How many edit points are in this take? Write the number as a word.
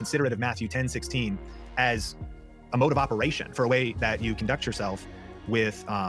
zero